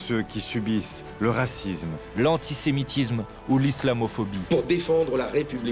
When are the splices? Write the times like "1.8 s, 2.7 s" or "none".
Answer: 1.0 s, 2.0 s